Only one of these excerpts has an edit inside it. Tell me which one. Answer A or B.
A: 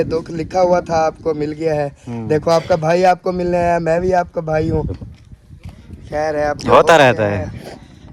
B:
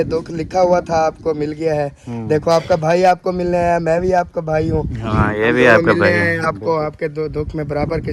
A